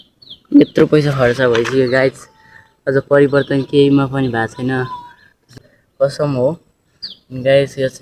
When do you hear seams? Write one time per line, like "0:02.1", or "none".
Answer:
0:05.5